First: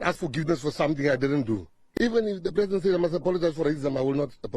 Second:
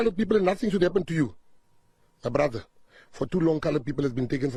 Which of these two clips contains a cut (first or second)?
first